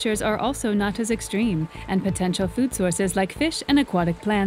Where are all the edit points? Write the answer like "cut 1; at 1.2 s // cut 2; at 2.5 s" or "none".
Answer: none